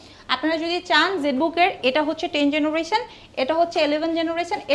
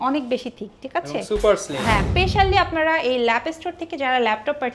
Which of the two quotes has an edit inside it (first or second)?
second